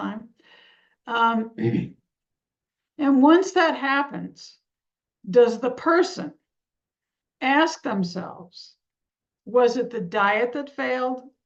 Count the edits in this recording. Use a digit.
0